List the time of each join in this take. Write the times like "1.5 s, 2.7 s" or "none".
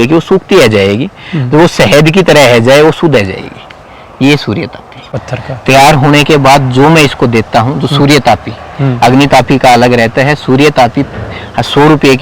5.3 s